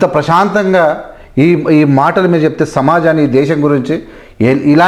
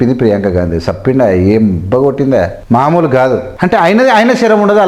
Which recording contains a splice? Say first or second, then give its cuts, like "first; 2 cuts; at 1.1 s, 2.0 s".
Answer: second; 2 cuts; at 2.6 s, 3.5 s